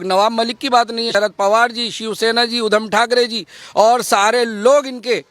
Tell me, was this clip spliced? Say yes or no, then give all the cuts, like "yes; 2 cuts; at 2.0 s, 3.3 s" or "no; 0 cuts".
yes; 1 cut; at 1.1 s